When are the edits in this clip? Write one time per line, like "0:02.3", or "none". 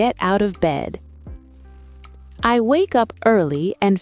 0:01.0
0:02.4